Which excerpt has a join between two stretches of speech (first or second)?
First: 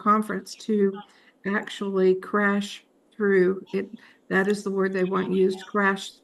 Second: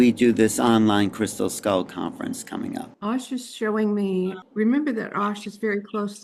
second